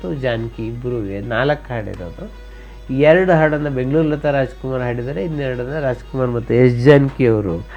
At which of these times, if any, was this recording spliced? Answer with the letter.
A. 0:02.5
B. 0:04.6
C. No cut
C